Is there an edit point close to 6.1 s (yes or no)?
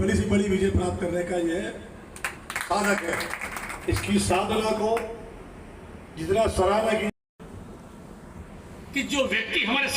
no